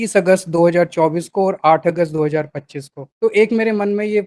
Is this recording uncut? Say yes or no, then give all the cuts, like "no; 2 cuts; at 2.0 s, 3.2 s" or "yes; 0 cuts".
no; 1 cut; at 3.0 s